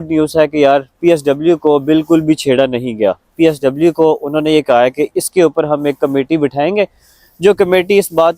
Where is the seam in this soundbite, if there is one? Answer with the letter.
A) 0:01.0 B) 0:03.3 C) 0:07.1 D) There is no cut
D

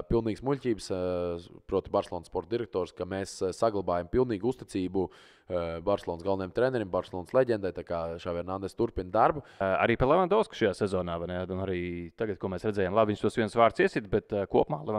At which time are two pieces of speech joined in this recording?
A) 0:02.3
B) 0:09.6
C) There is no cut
B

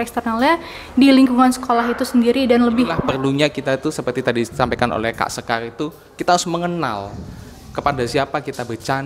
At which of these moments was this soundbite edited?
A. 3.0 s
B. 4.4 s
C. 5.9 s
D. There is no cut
A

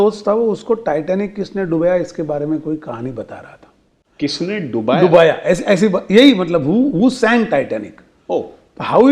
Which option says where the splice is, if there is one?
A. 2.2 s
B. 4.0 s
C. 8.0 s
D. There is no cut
B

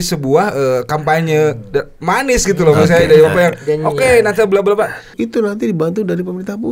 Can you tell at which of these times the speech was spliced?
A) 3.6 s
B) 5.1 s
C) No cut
B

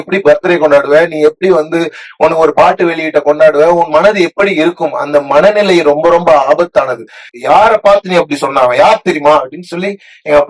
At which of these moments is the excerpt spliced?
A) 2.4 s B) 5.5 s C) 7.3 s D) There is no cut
C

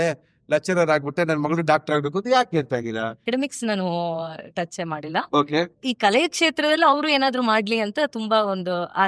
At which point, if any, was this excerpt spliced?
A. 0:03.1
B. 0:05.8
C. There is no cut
C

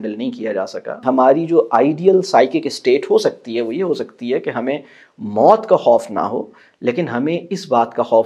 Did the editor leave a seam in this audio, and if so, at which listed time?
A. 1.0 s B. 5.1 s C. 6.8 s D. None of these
A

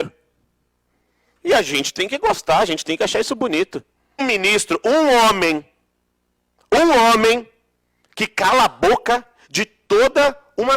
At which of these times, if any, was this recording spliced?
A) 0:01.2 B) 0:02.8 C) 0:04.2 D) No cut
C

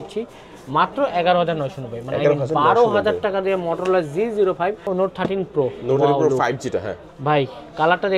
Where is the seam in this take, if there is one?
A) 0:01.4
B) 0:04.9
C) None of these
B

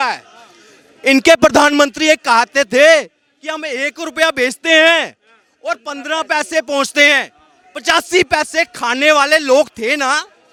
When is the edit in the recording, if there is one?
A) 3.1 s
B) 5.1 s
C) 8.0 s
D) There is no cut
D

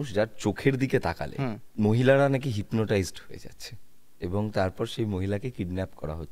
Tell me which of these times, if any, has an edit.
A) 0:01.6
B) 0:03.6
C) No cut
A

